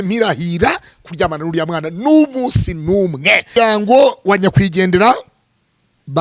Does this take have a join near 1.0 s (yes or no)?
no